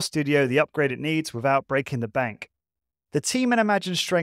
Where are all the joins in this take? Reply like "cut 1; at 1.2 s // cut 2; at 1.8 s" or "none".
none